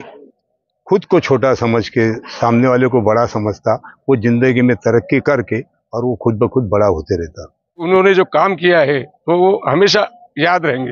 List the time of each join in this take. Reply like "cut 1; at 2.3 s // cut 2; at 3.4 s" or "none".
cut 1; at 7.8 s